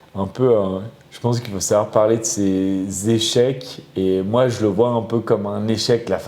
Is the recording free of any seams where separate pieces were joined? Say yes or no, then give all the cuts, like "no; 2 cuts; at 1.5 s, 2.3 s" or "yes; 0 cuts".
yes; 0 cuts